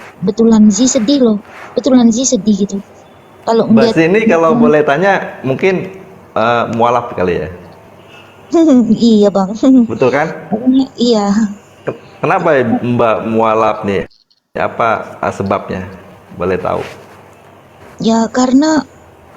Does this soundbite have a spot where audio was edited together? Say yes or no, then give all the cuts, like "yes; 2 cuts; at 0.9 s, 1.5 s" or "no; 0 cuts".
no; 0 cuts